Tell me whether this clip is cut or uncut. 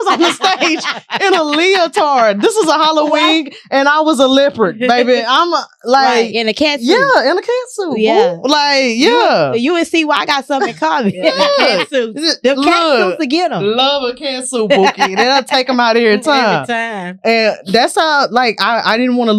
uncut